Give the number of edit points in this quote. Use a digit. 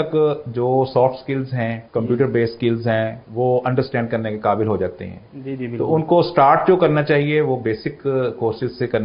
2